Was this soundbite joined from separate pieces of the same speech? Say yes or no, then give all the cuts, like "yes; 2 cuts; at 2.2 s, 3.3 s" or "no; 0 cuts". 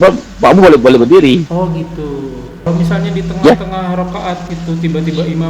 yes; 1 cut; at 2.5 s